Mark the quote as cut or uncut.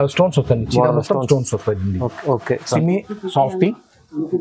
cut